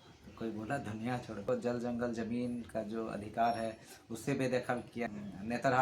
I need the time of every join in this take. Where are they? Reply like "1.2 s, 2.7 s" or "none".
1.4 s, 5.1 s